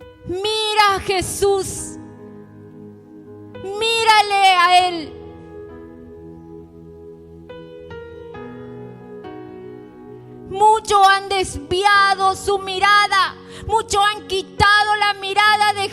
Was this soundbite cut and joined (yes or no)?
no